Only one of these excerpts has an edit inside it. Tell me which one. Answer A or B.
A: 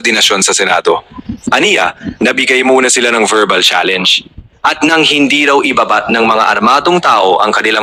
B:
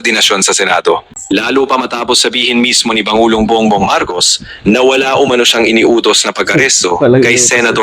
B